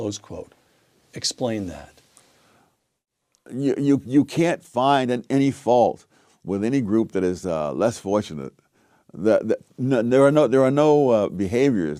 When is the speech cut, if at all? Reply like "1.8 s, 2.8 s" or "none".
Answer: none